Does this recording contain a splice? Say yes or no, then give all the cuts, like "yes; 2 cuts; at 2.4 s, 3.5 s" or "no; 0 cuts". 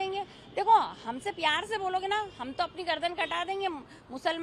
no; 0 cuts